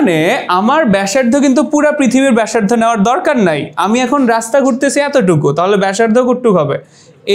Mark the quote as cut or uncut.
uncut